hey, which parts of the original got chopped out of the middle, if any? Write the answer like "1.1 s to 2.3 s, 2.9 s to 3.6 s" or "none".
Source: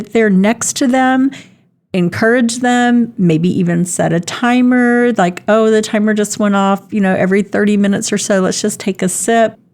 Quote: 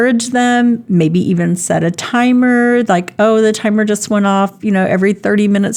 none

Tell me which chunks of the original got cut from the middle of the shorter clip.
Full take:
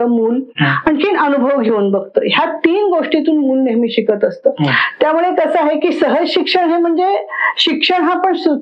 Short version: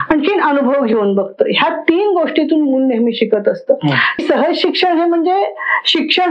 5.0 s to 5.9 s

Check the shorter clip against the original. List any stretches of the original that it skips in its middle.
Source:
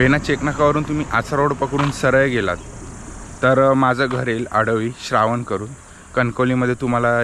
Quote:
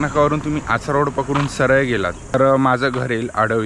2.8 s to 3.5 s

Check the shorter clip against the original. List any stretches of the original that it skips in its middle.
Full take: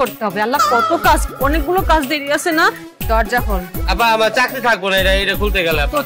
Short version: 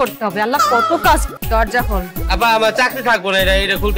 1.3 s to 2.9 s

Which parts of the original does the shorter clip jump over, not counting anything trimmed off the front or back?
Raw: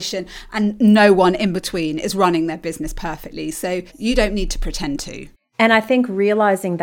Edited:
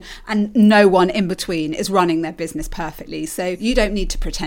3.8 s to 4.0 s

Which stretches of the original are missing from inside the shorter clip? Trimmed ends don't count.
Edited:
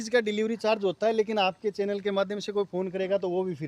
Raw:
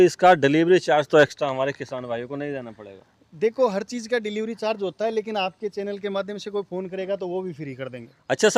none

